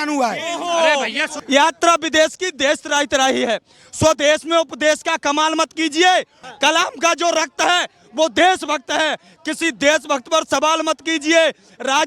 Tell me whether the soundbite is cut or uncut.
cut